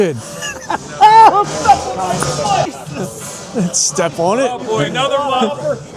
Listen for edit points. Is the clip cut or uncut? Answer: cut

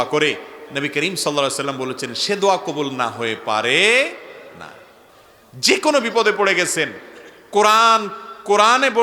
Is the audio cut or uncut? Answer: cut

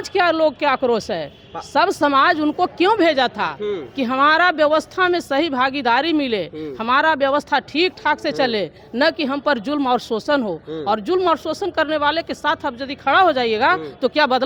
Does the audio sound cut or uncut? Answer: uncut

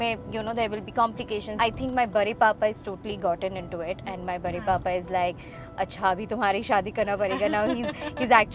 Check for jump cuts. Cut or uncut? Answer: cut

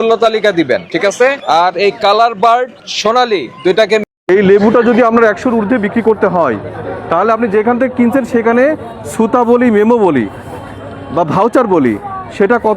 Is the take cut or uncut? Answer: cut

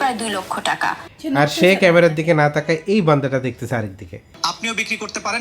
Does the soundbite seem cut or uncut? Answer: cut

